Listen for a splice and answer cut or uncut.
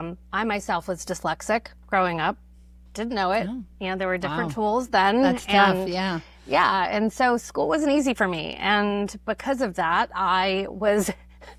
uncut